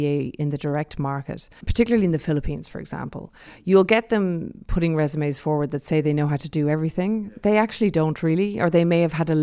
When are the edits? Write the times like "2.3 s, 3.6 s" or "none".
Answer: 1.6 s